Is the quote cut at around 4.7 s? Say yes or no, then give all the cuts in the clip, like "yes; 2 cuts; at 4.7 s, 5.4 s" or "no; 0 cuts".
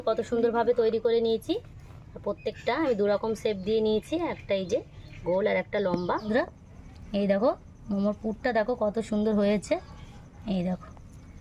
no; 1 cut; at 6.3 s